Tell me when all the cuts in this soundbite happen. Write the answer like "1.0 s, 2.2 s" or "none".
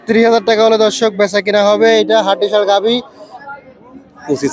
3.3 s